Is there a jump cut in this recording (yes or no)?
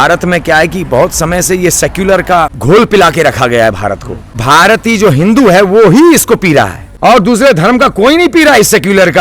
yes